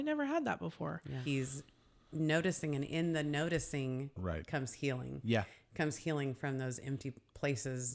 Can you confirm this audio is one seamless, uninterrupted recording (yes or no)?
no